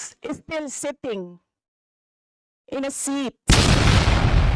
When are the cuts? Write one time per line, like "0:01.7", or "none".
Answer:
0:03.5